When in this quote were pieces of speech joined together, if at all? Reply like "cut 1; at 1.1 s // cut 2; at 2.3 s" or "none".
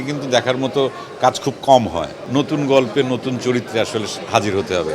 cut 1; at 2.1 s